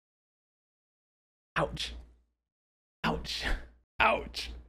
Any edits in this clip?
yes; 1 cut; at 3.8 s

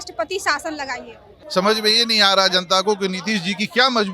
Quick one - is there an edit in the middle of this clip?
yes; 1 cut; at 1.4 s

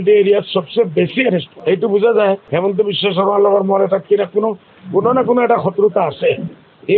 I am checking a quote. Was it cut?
yes; 2 cuts; at 1.5 s, 2.5 s

